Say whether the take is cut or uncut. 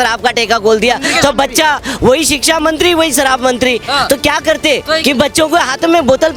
uncut